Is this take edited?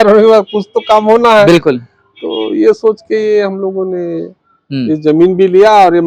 no; 0 cuts

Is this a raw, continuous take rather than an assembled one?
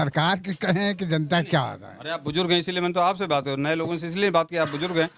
yes; 0 cuts

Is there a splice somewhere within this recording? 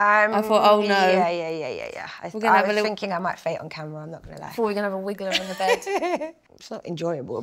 no; 0 cuts

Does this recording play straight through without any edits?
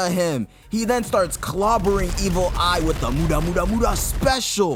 yes; 0 cuts

